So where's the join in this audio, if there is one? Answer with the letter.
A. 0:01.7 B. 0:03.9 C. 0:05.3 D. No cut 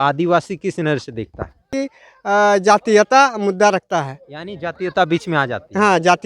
A